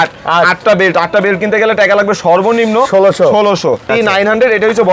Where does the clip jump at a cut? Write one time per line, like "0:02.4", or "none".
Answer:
0:03.9

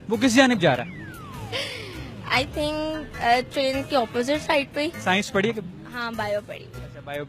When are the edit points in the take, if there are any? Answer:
0:05.0

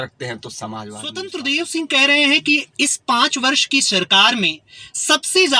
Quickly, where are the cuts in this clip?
0:01.3

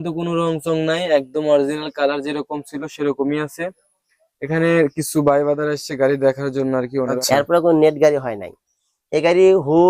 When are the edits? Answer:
0:07.1

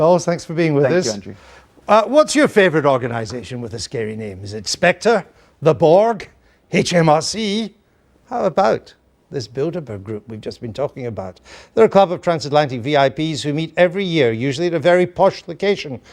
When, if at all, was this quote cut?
0:08.7

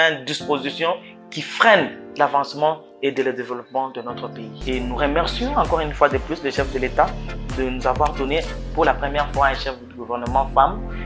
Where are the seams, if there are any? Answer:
0:04.5

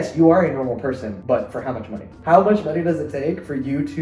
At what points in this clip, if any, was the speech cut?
0:01.1
0:02.1

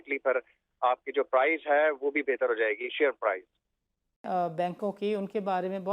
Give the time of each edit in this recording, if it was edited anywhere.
0:04.2

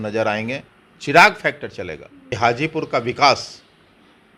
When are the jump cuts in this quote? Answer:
0:02.3

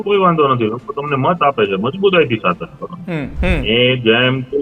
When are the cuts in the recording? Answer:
0:03.3

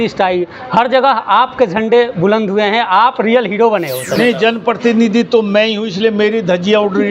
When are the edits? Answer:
0:04.0

